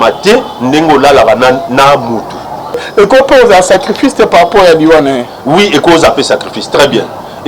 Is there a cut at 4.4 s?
no; 1 cut; at 2.9 s

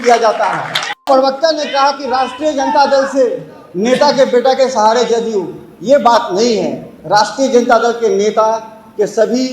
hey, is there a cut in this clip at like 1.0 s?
yes; 1 cut; at 1.0 s

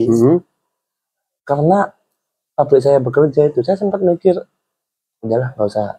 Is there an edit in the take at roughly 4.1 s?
no; 0 cuts

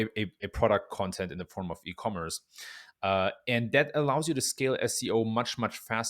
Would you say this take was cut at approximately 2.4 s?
no; 0 cuts

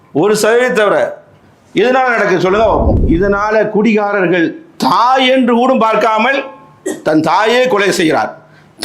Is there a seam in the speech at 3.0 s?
yes; 1 cut; at 3.0 s

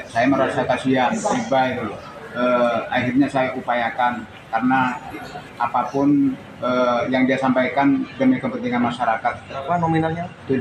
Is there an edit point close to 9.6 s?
yes; 1 cut; at 9.6 s

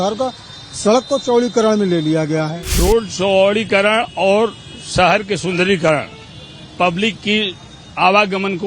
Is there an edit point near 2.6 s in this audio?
yes; 1 cut; at 2.6 s

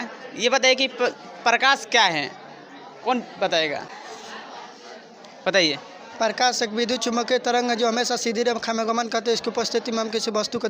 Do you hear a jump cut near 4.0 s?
yes; 1 cut; at 4.0 s

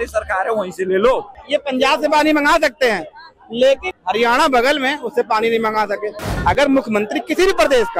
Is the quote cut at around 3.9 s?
yes; 3 cuts; at 1.4 s, 3.9 s, 6.3 s

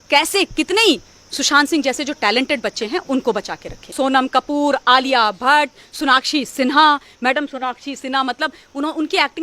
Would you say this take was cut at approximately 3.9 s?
yes; 1 cut; at 3.9 s

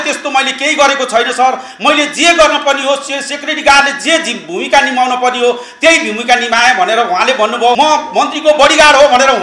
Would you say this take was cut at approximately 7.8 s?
yes; 1 cut; at 7.8 s

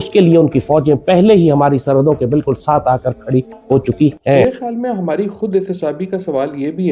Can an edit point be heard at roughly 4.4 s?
yes; 1 cut; at 4.4 s

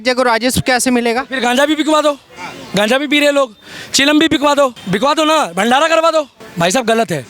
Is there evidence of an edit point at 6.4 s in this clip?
yes; 2 cuts; at 4.8 s, 6.4 s

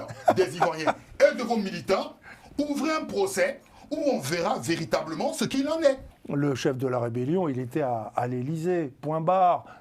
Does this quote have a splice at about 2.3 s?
no; 1 cut; at 6.1 s

